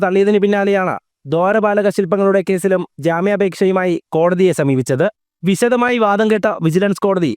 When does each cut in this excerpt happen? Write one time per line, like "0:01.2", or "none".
0:05.3